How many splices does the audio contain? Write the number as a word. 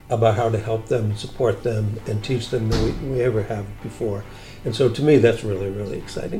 zero